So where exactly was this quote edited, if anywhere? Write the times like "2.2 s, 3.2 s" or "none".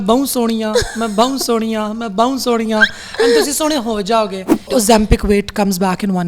4.6 s